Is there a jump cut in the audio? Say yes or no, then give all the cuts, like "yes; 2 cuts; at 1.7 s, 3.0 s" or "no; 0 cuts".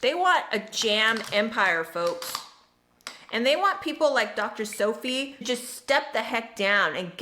yes; 1 cut; at 5.4 s